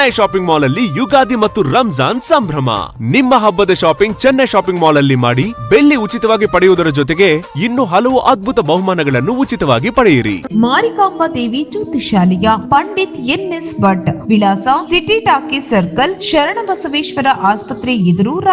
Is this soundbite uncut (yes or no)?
no